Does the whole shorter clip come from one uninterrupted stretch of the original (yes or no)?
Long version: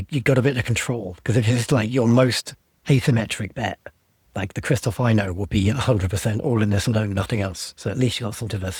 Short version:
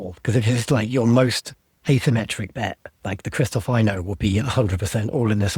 no